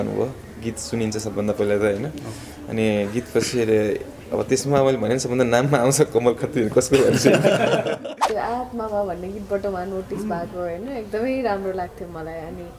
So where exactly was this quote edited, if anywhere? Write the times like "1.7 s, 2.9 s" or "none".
8.1 s